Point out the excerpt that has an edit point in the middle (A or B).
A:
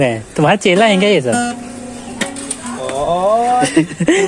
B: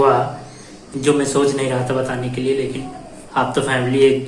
A